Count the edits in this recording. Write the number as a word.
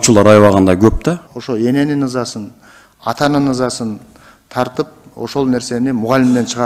one